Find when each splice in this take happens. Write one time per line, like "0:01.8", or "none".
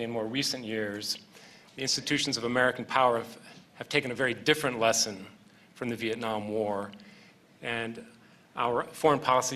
0:06.3